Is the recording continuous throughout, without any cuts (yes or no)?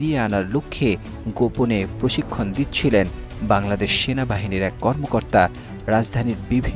no